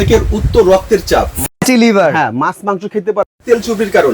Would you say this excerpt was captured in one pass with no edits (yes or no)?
yes